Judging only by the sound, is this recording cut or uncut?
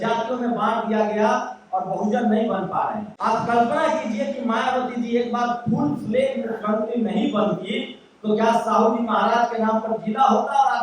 cut